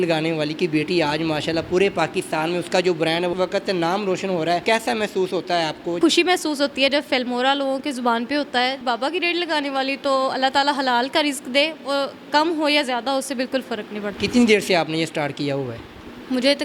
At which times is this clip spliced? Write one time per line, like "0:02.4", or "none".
0:03.3
0:04.6
0:06.0
0:08.8
0:14.2